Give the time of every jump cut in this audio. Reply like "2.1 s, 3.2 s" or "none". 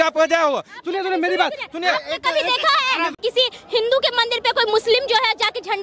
3.1 s